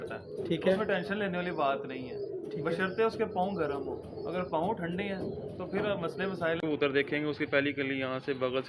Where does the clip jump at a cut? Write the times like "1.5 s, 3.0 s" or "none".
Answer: 6.6 s